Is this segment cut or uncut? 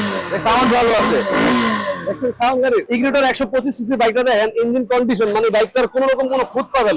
cut